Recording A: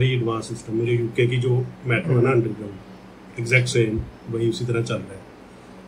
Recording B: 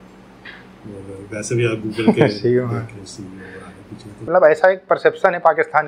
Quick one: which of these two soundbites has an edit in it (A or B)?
B